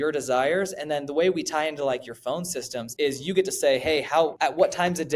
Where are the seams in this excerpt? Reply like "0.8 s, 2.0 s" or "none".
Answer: 2.8 s, 4.3 s